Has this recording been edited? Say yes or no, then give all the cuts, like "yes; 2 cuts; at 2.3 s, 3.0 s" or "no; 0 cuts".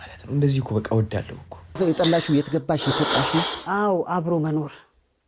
yes; 1 cut; at 1.8 s